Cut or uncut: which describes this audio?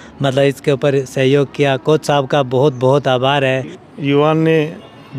cut